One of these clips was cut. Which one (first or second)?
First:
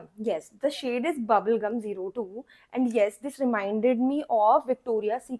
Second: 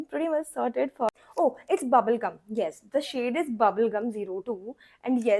second